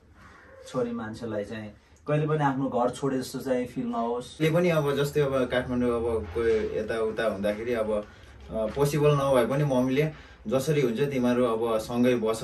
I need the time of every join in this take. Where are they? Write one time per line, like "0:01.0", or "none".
0:04.4